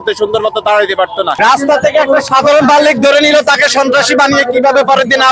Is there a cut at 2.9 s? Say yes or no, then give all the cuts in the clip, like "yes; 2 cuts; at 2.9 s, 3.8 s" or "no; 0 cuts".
no; 1 cut; at 1.4 s